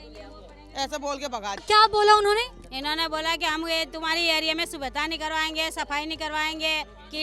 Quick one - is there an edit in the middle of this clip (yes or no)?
yes